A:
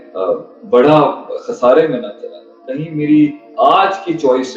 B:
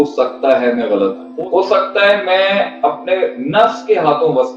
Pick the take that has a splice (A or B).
B